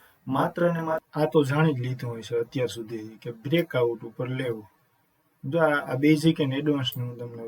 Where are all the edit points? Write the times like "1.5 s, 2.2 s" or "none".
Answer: 1.0 s